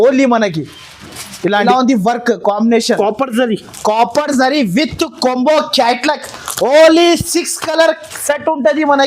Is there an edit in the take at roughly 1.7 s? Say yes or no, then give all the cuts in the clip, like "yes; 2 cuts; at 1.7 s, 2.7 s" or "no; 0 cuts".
yes; 1 cut; at 1.7 s